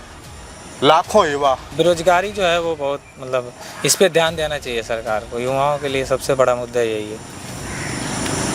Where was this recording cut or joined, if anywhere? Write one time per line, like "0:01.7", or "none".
0:01.7